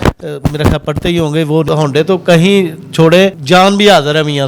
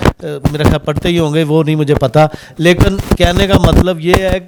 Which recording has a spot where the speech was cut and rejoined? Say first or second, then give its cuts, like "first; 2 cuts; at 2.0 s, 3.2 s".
first; 2 cuts; at 1.7 s, 3.4 s